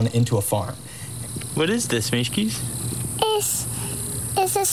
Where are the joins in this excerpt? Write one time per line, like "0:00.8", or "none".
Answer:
0:01.2